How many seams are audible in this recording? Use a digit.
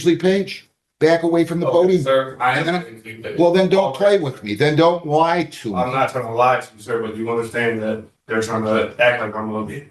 0